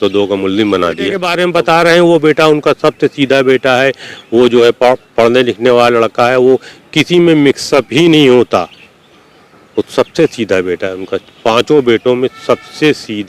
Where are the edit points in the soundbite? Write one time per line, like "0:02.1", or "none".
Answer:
0:01.2